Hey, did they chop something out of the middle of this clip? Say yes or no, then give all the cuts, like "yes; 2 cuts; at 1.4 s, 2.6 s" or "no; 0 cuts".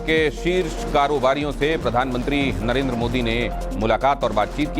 yes; 1 cut; at 3.6 s